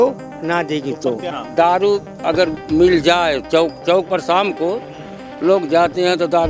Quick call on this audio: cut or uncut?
cut